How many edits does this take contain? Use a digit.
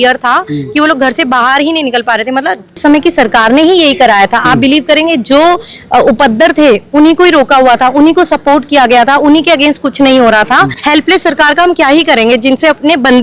2